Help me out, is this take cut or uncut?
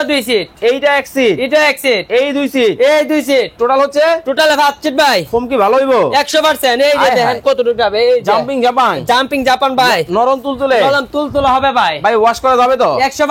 uncut